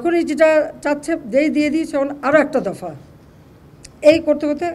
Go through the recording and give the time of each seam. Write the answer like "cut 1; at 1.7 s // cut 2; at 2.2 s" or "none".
cut 1; at 1.2 s